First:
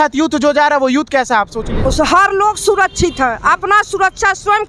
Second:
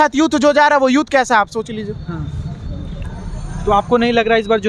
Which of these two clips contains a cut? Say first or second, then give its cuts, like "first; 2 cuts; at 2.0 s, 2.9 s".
first; 1 cut; at 1.9 s